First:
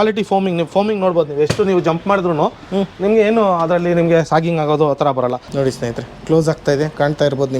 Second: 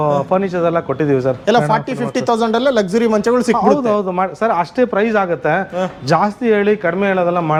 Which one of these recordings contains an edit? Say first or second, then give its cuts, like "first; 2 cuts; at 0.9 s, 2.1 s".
first; 1 cut; at 5.4 s